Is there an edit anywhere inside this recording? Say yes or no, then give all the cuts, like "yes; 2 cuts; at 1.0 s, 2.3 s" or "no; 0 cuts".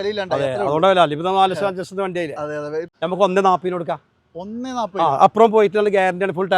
yes; 1 cut; at 2.9 s